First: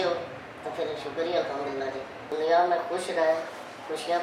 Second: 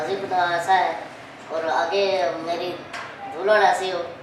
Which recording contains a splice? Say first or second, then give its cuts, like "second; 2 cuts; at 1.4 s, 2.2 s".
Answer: first; 1 cut; at 2.3 s